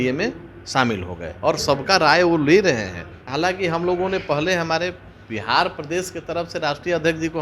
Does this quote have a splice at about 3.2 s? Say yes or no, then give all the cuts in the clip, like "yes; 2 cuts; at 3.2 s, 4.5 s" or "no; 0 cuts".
yes; 1 cut; at 3.2 s